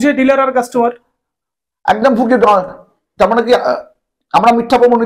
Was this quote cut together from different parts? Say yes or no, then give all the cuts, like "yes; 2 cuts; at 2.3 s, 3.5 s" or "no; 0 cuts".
no; 0 cuts